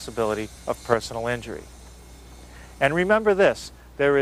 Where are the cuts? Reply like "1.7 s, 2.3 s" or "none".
2.9 s

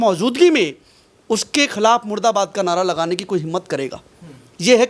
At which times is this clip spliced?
none

